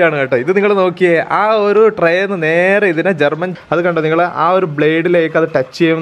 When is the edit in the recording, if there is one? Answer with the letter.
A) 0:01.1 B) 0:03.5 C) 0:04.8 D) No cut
B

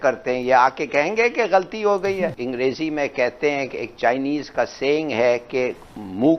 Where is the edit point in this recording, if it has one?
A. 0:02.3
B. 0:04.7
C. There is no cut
A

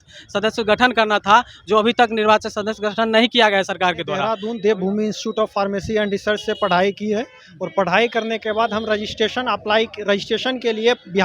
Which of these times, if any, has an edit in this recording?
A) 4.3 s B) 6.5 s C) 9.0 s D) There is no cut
A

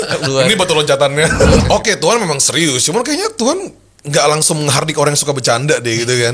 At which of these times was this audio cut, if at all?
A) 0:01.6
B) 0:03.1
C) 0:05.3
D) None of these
A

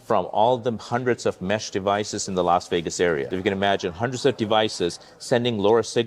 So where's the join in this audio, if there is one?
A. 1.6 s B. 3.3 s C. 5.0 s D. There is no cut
B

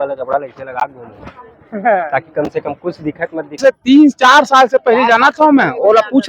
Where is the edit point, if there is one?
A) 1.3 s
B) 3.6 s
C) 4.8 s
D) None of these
B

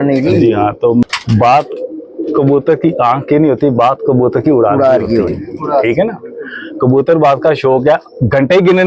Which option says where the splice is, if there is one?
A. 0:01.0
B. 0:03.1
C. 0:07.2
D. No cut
A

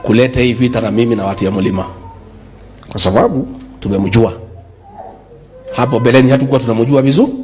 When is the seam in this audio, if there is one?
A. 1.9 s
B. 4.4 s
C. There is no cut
C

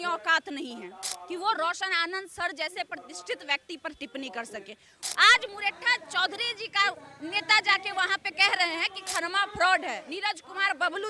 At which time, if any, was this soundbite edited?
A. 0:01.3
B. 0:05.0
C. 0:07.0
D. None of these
B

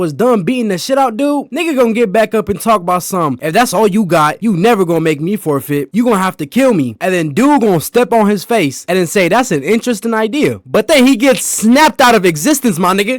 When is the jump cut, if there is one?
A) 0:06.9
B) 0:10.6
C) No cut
B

